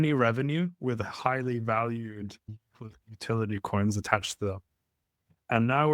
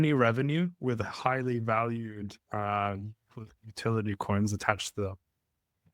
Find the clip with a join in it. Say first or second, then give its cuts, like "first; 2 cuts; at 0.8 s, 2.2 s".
first; 1 cut; at 2.5 s